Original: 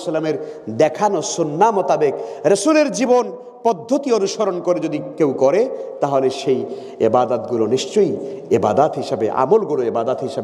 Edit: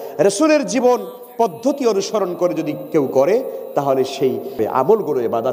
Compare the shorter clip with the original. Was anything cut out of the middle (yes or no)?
yes